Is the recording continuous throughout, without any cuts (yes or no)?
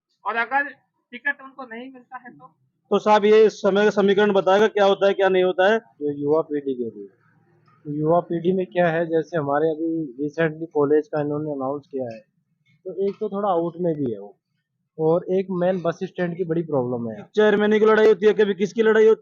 no